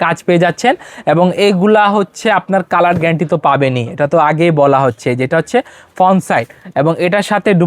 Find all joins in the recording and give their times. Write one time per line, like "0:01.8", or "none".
none